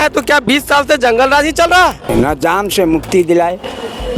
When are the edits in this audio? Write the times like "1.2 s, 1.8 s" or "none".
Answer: 2.1 s